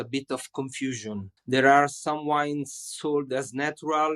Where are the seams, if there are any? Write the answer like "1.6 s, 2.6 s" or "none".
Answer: 1.3 s